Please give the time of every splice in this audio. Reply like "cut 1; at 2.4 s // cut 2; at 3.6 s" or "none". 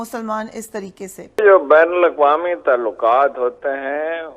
cut 1; at 1.4 s